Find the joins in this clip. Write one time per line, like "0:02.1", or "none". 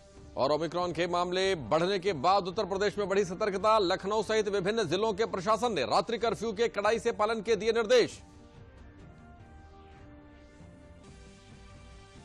0:10.9

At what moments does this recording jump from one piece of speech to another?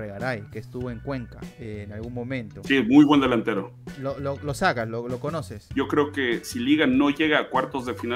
0:05.6

